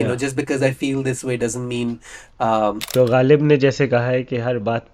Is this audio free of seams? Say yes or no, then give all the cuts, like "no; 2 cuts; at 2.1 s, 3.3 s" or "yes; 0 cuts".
no; 1 cut; at 2.8 s